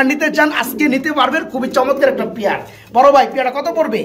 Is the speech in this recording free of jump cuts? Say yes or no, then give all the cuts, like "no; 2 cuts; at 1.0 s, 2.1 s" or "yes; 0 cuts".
yes; 0 cuts